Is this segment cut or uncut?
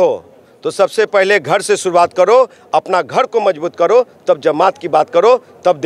uncut